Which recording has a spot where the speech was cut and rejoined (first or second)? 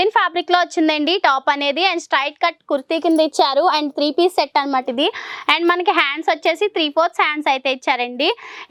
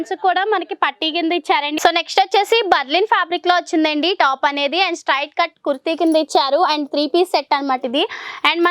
second